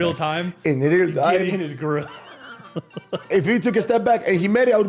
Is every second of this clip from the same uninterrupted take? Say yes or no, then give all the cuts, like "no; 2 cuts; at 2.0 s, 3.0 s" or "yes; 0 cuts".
yes; 0 cuts